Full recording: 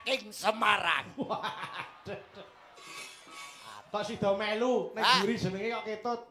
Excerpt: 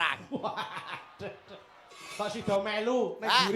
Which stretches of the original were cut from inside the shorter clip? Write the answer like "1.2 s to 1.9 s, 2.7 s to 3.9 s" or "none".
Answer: 3.0 s to 3.8 s